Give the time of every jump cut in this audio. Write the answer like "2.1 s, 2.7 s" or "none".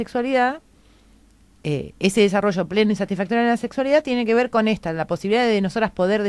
none